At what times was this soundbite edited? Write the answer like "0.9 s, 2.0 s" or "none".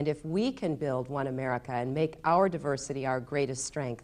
3.1 s